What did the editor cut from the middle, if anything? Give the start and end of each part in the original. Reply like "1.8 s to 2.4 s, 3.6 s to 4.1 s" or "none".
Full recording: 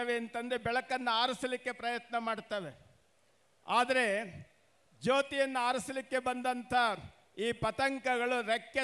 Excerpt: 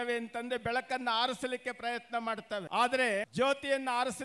2.7 s to 3.6 s, 4.3 s to 5.0 s